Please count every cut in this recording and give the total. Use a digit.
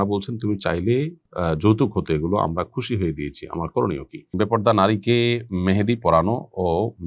1